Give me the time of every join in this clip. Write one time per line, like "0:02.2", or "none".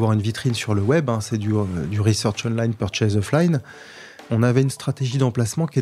0:04.2